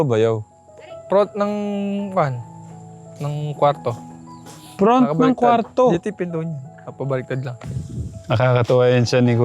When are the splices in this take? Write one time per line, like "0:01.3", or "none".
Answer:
0:07.6